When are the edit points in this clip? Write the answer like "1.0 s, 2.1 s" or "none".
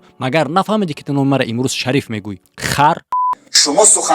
3.2 s